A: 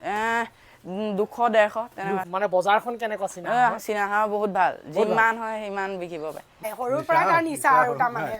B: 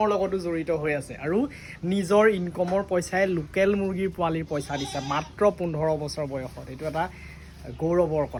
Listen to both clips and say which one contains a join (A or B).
A